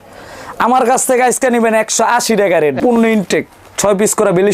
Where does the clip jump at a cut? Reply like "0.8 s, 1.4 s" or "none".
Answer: 2.8 s